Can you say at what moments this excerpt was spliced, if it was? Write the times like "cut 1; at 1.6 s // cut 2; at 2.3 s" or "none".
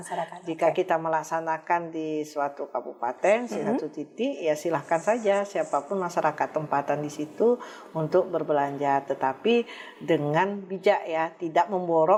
none